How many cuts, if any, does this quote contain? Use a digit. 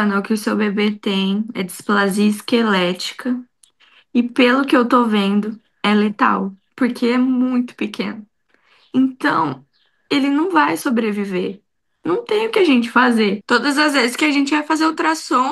1